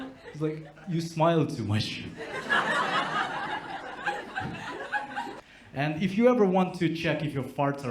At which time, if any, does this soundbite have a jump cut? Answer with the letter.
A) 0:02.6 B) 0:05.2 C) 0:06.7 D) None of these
B